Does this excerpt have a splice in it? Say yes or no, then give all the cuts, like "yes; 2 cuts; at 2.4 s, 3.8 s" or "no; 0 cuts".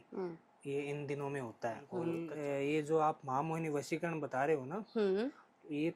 yes; 1 cut; at 2.1 s